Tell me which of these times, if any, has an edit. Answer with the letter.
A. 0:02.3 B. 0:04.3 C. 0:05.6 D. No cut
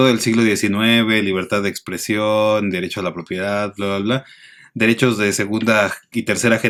D